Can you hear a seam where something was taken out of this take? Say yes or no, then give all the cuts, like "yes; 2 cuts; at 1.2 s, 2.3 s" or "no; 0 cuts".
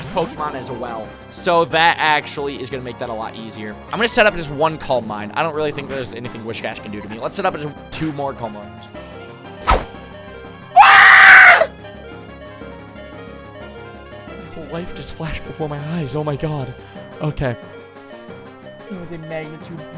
yes; 1 cut; at 3.9 s